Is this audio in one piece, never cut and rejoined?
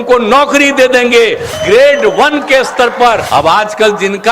no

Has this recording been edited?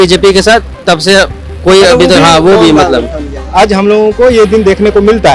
yes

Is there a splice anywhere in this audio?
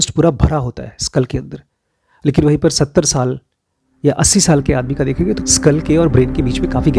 no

